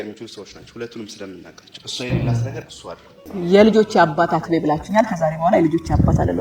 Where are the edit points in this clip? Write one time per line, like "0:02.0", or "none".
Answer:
0:03.3